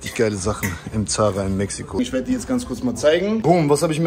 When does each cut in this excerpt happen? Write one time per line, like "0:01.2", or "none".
0:02.0